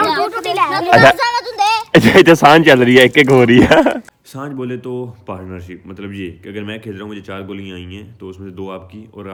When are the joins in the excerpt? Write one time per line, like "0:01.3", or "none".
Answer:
none